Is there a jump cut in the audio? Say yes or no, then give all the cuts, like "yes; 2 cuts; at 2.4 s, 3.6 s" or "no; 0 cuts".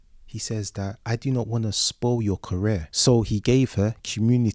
yes; 1 cut; at 2.9 s